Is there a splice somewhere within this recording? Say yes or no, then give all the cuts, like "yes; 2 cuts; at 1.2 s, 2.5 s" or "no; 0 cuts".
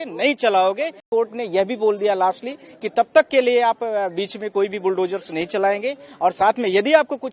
yes; 1 cut; at 1.0 s